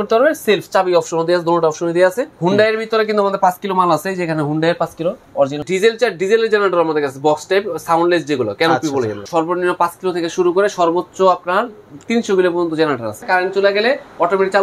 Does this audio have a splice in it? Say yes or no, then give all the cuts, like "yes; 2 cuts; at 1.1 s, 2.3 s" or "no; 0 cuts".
yes; 4 cuts; at 2.3 s, 5.7 s, 9.2 s, 13.2 s